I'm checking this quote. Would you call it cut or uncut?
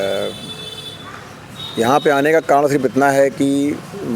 uncut